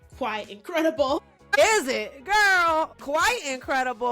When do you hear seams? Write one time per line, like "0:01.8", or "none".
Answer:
0:01.2
0:02.9